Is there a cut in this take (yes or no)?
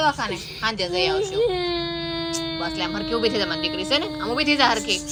no